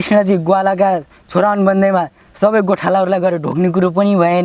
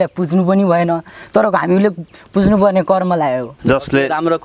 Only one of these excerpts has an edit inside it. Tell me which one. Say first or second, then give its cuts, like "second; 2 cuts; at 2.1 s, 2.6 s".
second; 1 cut; at 3.5 s